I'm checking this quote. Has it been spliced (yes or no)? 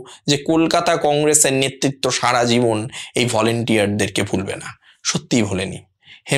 no